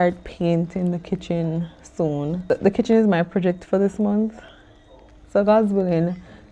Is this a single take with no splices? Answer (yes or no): no